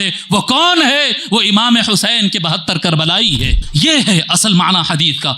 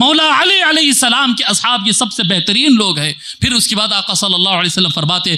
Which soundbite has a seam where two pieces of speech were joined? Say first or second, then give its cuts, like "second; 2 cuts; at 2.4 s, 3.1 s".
first; 1 cut; at 3.6 s